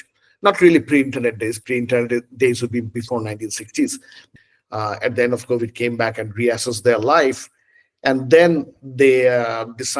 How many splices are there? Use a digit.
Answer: 1